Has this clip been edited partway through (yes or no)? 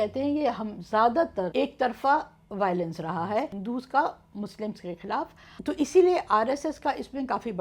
yes